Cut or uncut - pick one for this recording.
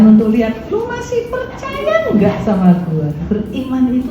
cut